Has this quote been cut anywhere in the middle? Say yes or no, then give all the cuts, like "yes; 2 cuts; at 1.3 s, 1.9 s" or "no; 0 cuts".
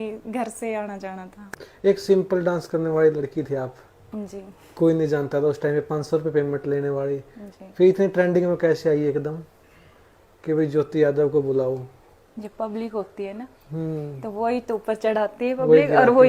yes; 1 cut; at 1.7 s